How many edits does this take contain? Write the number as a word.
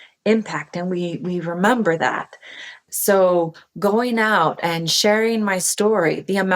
one